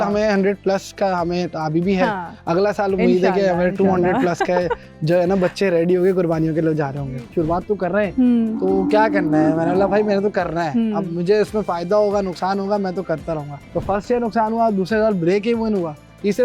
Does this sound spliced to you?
yes; 2 cuts; at 7.1 s, 13.7 s

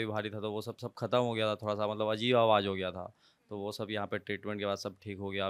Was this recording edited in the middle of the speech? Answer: no; 0 cuts

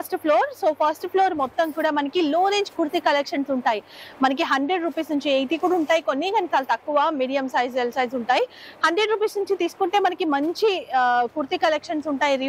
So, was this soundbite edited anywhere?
no; 0 cuts

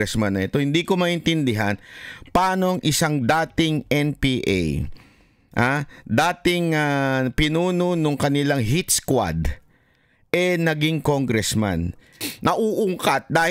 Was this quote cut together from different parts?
yes; 1 cut; at 12.2 s

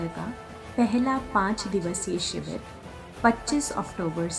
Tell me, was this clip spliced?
no; 0 cuts

